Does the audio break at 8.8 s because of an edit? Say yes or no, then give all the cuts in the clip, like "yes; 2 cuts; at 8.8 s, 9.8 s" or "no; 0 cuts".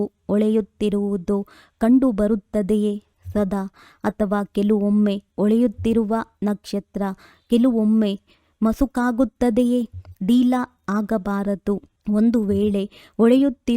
no; 1 cut; at 5.9 s